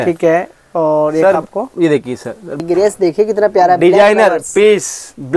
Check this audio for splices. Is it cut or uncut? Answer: cut